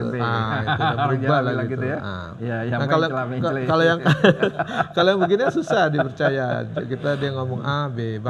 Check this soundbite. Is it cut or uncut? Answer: uncut